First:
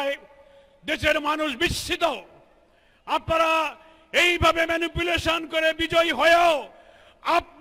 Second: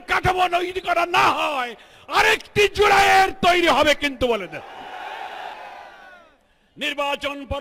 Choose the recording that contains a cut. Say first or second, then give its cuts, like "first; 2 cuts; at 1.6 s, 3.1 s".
second; 1 cut; at 5.5 s